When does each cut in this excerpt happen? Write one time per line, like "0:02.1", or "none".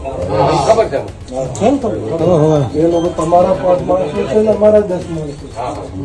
none